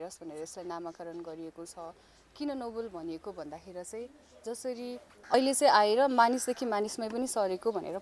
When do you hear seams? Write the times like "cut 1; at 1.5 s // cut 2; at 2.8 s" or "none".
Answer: cut 1; at 5.3 s